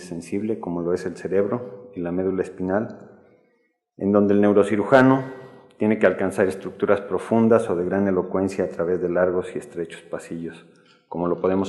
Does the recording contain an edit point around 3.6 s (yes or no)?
no